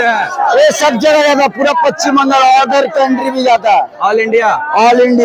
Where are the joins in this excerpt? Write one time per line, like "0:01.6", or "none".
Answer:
none